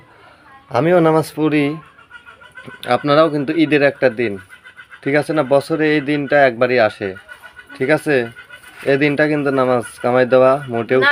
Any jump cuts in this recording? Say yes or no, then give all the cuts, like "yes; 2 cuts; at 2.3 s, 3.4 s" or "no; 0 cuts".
no; 0 cuts